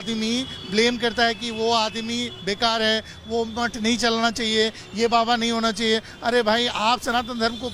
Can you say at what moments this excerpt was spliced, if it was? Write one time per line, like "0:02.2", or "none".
none